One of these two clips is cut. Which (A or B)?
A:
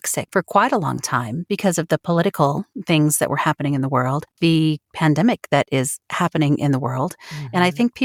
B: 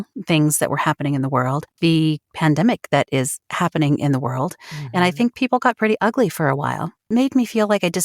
B